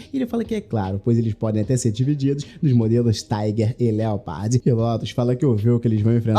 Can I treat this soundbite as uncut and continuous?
no; 1 cut; at 5.0 s

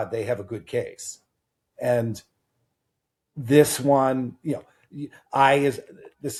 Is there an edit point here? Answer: no; 0 cuts

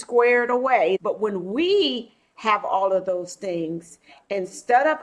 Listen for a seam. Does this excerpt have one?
yes; 1 cut; at 1.0 s

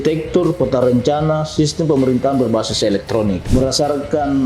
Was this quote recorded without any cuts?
no; 1 cut; at 3.4 s

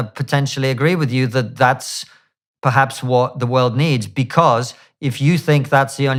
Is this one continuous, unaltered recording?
yes; 0 cuts

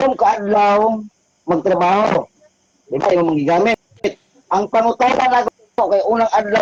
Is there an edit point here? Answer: no; 0 cuts

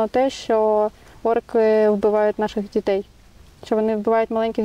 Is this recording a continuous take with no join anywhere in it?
yes; 0 cuts

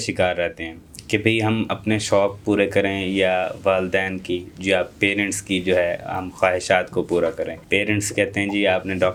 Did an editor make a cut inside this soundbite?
no; 0 cuts

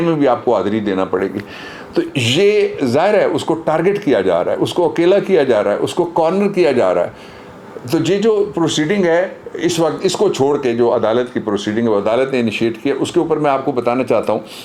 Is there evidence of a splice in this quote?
no; 0 cuts

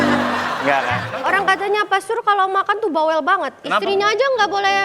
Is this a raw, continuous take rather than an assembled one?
no; 1 cut; at 1.1 s

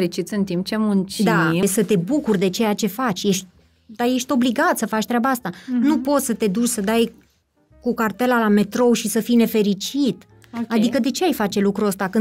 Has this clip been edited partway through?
yes; 1 cut; at 1.6 s

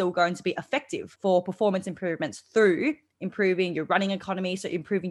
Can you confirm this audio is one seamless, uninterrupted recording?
no; 1 cut; at 1.0 s

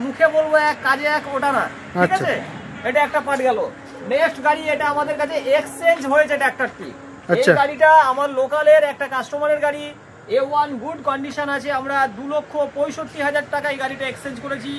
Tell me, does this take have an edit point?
no; 0 cuts

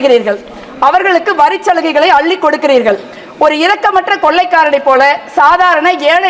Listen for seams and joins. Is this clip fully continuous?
yes; 0 cuts

